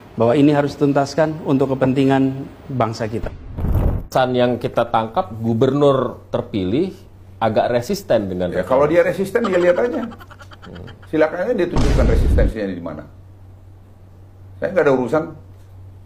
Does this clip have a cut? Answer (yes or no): yes